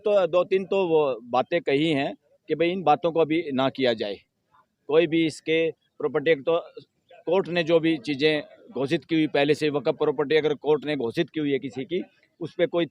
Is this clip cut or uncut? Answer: uncut